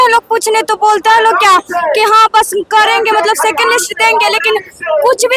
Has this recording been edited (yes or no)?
no